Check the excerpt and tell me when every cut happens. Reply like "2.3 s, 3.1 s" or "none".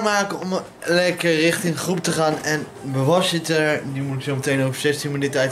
none